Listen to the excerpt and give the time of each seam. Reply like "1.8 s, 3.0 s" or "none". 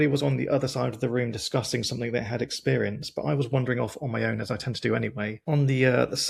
none